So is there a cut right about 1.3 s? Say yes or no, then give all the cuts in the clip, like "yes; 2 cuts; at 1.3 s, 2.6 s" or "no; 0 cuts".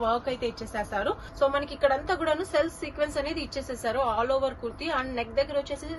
yes; 1 cut; at 1.3 s